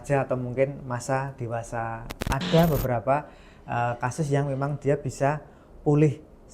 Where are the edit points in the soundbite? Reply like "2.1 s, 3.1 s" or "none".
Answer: 2.1 s